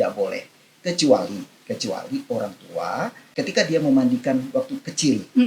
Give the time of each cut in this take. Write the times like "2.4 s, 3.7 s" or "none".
3.4 s